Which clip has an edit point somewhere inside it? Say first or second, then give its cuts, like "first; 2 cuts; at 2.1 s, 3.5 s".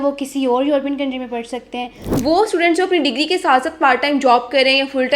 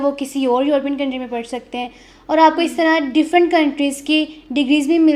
first; 1 cut; at 2.0 s